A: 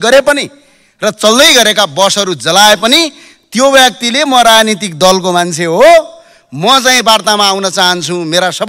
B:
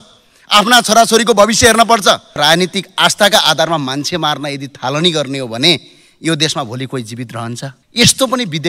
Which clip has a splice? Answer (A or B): B